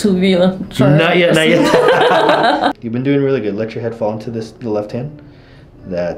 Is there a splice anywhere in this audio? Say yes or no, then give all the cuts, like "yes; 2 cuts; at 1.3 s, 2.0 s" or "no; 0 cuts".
yes; 1 cut; at 2.8 s